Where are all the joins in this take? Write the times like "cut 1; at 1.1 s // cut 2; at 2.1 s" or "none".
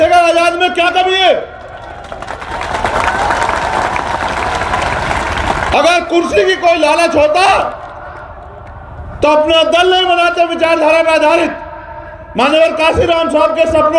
none